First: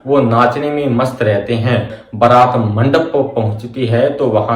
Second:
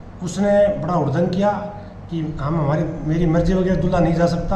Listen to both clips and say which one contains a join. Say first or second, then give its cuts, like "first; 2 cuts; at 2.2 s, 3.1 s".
first; 1 cut; at 2.0 s